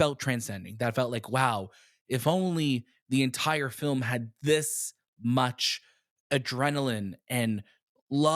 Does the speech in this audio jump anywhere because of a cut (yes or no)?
no